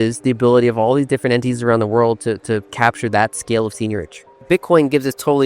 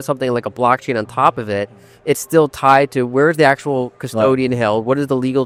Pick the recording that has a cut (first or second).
first